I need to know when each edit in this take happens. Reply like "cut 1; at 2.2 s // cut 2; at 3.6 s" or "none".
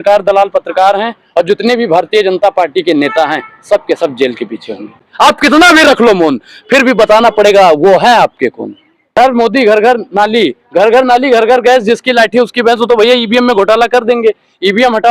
cut 1; at 5.0 s // cut 2; at 9.2 s